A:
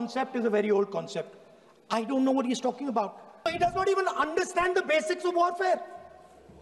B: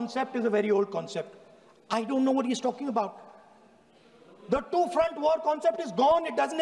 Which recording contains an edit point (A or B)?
A